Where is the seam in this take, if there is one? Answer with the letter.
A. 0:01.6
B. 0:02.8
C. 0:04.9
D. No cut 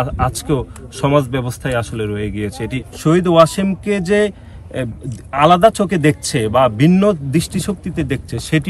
B